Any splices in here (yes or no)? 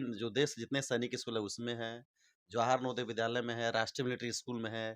no